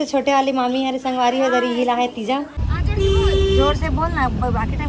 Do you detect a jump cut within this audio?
yes; 1 cut; at 2.6 s

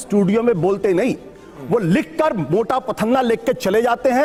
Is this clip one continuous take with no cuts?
yes; 0 cuts

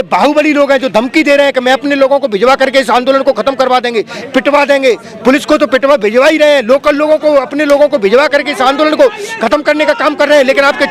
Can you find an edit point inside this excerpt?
no; 0 cuts

